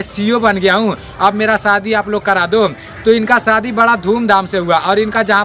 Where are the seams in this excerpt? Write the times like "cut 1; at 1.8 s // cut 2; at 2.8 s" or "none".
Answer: none